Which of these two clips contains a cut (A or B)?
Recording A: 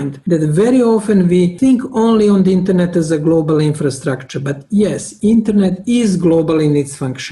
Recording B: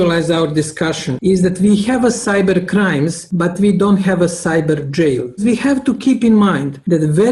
B